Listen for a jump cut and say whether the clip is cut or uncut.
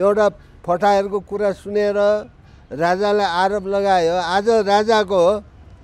uncut